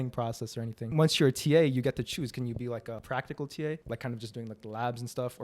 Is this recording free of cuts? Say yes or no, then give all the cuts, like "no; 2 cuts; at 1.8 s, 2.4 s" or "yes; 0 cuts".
no; 3 cuts; at 0.9 s, 3.0 s, 3.8 s